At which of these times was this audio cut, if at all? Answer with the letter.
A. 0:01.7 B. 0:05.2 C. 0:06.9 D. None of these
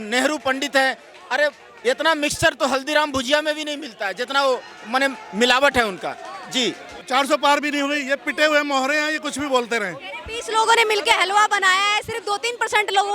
C